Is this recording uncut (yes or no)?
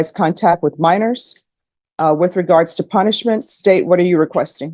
yes